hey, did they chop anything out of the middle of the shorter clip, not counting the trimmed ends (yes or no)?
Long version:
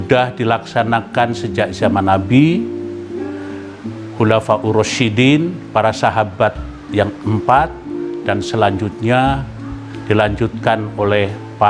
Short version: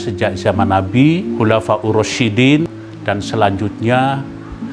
yes